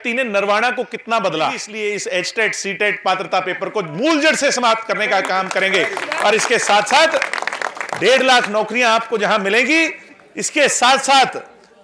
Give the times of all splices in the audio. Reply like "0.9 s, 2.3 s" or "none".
1.8 s